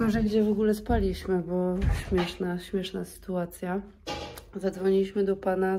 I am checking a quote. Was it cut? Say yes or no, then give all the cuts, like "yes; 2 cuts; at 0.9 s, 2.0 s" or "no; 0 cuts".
no; 0 cuts